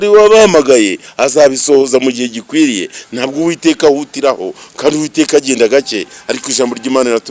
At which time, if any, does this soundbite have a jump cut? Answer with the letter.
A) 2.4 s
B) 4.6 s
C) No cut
C